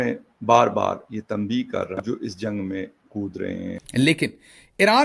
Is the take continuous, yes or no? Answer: no